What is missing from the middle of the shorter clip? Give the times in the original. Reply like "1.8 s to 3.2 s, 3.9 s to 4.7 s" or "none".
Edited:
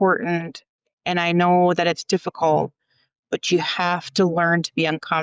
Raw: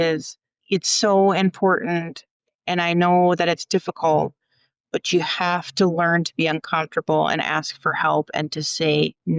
none